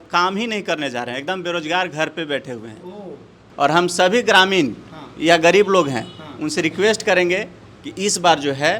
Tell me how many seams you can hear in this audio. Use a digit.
1